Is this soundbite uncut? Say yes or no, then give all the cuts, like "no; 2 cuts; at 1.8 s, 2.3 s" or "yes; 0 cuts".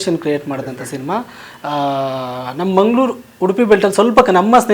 yes; 0 cuts